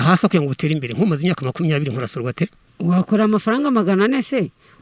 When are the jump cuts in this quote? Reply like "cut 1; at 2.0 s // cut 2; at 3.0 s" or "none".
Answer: cut 1; at 2.6 s